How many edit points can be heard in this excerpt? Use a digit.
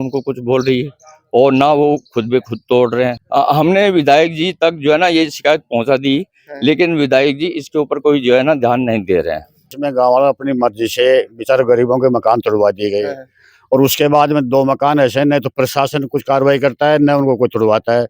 2